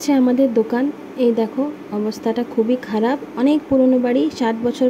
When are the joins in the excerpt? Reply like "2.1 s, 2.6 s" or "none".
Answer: none